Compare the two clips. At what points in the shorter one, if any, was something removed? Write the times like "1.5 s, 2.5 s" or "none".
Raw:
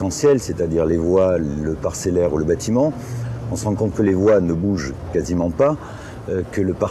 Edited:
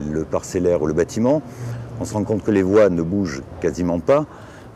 none